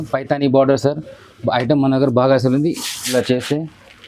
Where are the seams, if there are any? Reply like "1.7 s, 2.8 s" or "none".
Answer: 3.1 s